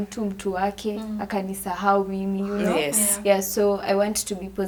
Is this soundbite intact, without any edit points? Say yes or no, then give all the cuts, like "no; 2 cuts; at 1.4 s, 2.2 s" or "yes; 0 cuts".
yes; 0 cuts